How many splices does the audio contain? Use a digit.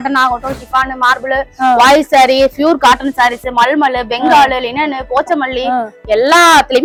0